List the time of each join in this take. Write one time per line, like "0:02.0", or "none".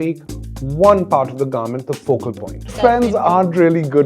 0:02.8